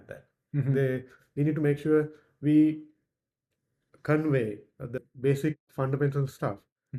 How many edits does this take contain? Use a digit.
1